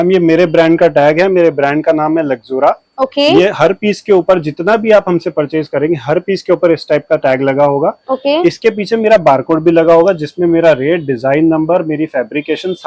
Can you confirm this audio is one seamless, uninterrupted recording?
yes; 0 cuts

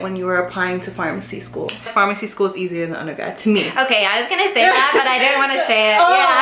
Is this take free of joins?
no; 1 cut; at 1.9 s

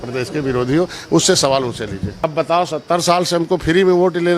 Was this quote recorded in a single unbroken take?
no; 1 cut; at 2.1 s

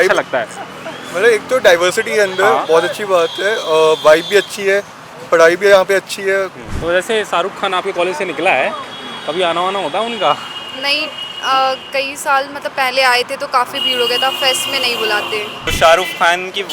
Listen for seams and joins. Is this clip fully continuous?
no; 2 cuts; at 6.7 s, 15.6 s

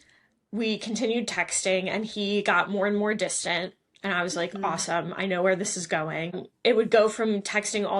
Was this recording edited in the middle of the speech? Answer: yes; 1 cut; at 6.5 s

